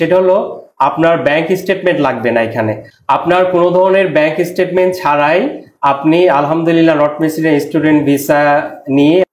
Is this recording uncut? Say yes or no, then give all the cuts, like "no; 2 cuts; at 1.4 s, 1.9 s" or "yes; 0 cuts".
yes; 0 cuts